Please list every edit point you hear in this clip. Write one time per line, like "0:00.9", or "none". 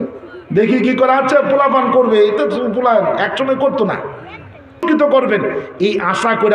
0:04.8